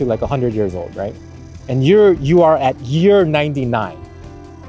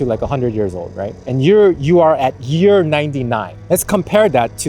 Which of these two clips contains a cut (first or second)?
second